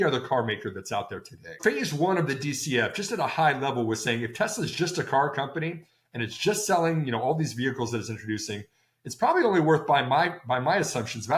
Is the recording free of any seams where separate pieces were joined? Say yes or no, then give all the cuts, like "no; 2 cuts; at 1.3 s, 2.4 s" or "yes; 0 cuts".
no; 1 cut; at 1.6 s